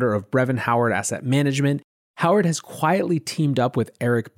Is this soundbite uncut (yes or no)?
no